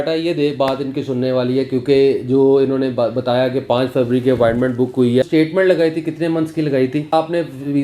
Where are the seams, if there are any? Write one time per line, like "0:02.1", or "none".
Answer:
0:05.3
0:07.1